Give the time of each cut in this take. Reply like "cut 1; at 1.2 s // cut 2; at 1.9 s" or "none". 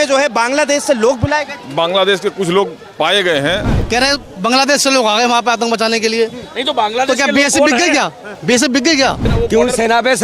cut 1; at 3.7 s // cut 2; at 9.2 s